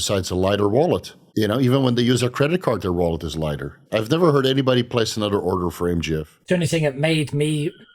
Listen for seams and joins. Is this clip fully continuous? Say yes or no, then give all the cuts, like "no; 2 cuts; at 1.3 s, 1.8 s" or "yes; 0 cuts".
no; 3 cuts; at 1.2 s, 3.7 s, 6.3 s